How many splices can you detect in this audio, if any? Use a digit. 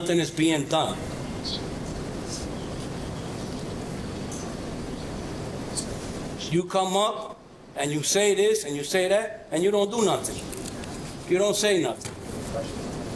0